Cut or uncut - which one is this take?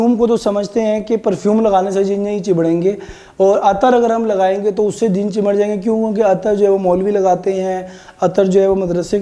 uncut